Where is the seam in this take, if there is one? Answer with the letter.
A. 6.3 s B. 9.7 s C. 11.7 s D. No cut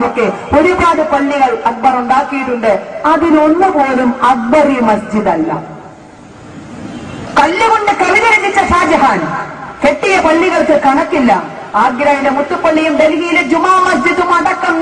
A